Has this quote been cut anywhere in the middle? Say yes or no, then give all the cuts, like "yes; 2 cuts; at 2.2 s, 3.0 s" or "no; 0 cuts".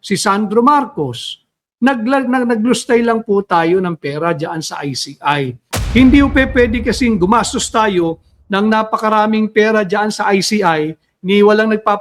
yes; 1 cut; at 5.7 s